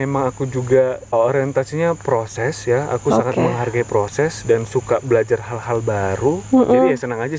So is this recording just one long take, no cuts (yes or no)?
no